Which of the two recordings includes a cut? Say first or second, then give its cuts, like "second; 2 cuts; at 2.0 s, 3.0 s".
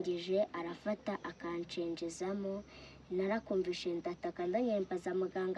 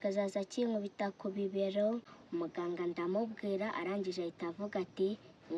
second; 1 cut; at 2.1 s